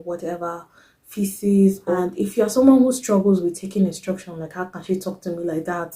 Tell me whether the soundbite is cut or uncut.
cut